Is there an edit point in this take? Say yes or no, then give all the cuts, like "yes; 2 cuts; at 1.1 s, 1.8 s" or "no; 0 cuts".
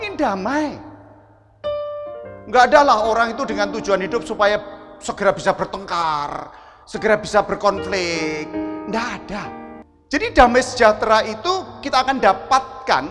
yes; 1 cut; at 9.8 s